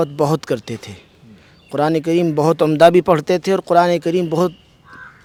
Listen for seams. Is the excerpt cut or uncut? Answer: uncut